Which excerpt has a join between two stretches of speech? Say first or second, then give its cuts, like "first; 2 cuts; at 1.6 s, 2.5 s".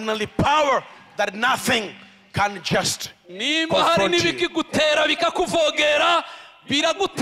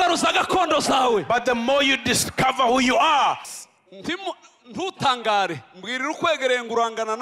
second; 1 cut; at 3.5 s